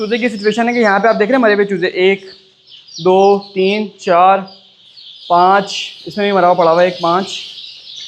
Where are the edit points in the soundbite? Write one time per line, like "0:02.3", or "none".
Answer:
none